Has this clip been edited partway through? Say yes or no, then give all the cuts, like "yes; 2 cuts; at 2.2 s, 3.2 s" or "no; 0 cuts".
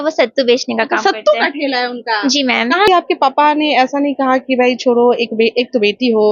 yes; 1 cut; at 2.9 s